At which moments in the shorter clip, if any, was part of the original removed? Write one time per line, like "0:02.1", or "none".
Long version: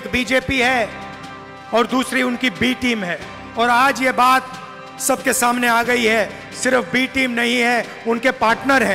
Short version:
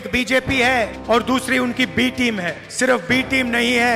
0:01.0
0:02.6